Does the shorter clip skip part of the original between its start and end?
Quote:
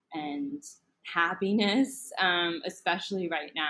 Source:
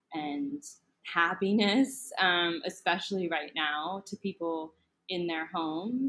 no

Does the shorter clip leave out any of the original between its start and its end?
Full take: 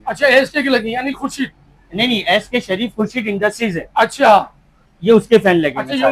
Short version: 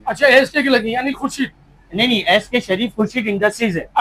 no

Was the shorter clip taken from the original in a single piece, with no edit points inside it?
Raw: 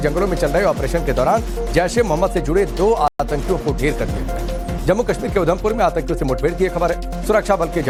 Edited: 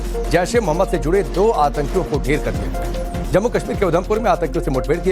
no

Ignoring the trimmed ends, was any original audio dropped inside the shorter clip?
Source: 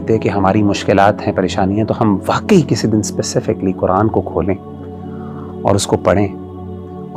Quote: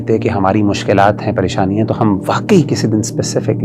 no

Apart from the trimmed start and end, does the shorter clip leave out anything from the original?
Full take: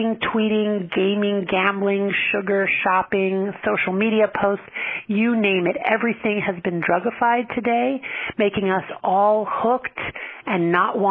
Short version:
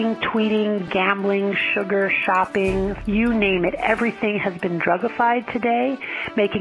yes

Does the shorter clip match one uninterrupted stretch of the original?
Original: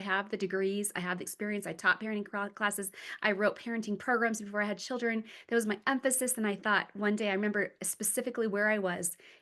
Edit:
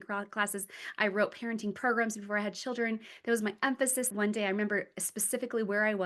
no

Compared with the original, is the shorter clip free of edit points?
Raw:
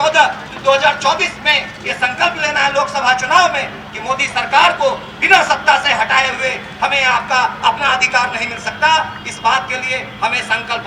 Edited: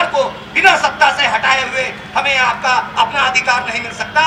yes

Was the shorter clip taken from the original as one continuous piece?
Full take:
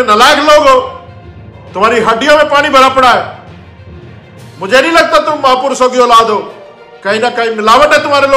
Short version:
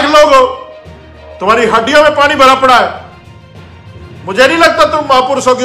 yes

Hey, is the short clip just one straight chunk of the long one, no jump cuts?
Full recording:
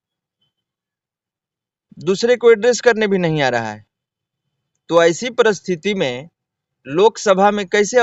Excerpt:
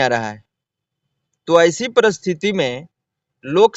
yes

